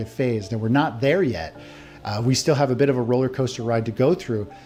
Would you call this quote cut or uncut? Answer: uncut